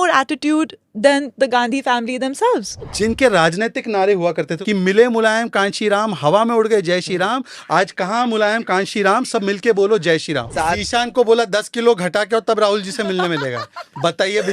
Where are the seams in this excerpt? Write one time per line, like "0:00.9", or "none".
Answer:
none